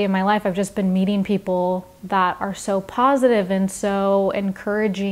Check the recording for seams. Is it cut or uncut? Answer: uncut